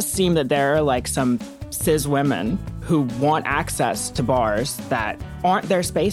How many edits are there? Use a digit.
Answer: 1